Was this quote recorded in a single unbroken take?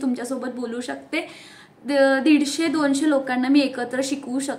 yes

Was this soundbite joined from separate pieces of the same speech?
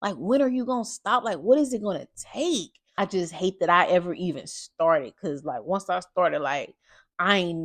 yes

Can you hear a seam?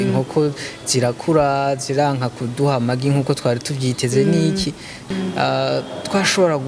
yes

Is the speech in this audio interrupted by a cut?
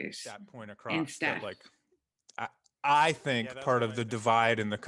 yes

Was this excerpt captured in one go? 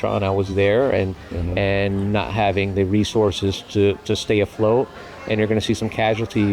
yes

